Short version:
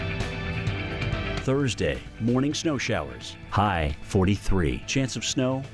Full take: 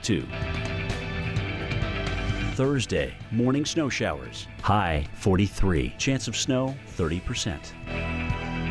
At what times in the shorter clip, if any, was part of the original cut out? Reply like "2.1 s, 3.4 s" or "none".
1.4 s